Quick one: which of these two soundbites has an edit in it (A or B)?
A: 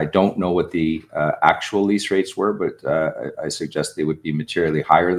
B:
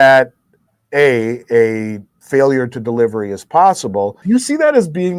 B